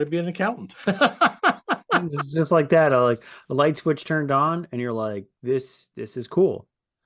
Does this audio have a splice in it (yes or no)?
no